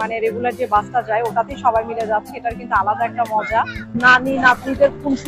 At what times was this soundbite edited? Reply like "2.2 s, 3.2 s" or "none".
3.8 s